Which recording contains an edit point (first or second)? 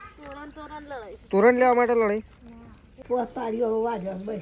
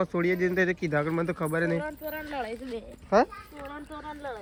first